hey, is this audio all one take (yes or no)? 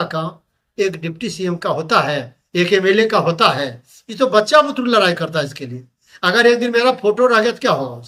yes